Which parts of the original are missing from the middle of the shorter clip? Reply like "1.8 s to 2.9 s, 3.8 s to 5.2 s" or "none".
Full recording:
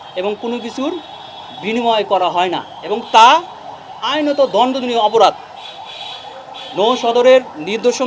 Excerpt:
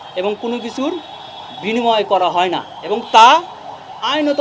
none